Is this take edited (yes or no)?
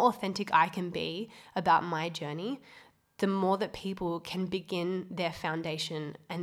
no